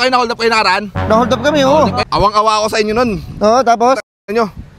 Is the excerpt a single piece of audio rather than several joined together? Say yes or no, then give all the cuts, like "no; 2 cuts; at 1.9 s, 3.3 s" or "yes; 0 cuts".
no; 1 cut; at 2.0 s